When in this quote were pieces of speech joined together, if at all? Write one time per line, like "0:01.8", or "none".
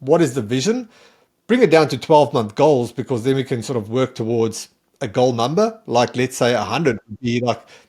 none